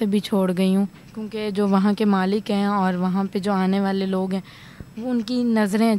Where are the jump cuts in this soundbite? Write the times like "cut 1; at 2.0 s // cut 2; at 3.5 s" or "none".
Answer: none